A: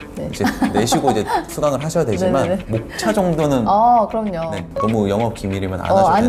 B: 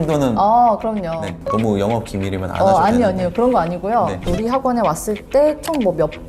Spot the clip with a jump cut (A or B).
B